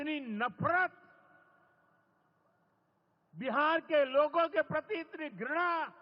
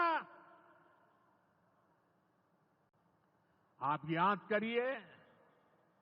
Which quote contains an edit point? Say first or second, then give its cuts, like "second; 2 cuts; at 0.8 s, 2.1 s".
second; 1 cut; at 2.9 s